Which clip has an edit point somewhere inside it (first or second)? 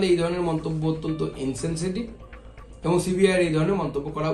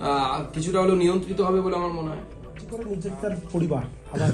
second